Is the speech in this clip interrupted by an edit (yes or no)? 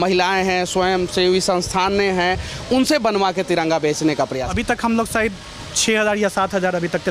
yes